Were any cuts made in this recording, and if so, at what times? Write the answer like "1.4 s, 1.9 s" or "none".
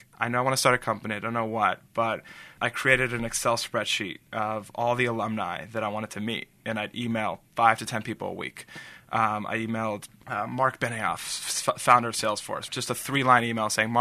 2.5 s, 10.1 s, 12.7 s